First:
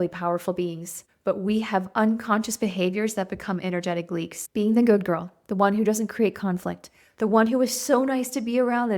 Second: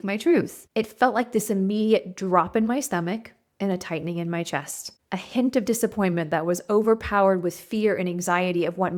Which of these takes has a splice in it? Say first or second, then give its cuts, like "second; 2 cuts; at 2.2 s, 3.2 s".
first; 1 cut; at 4.4 s